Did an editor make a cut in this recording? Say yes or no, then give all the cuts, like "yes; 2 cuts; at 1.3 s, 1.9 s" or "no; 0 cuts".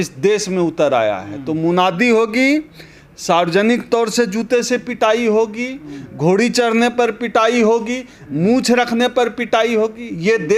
no; 0 cuts